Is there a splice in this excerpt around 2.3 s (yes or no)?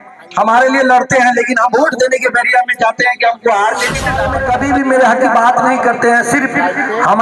no